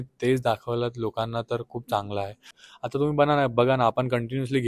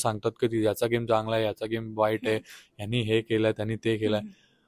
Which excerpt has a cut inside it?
first; 1 cut; at 2.5 s

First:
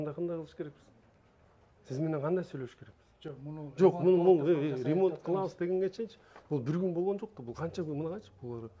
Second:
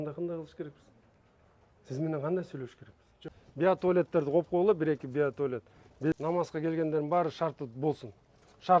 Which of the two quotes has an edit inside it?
second; 2 cuts; at 3.4 s, 6.1 s

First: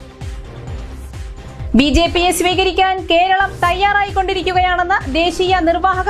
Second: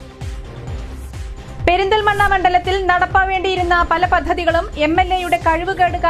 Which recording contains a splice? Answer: first; 1 cut; at 1.4 s

